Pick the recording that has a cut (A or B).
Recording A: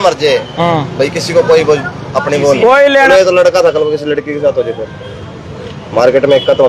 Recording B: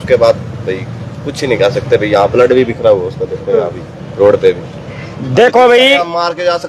A